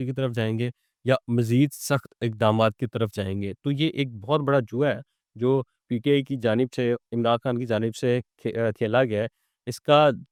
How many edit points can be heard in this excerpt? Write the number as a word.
zero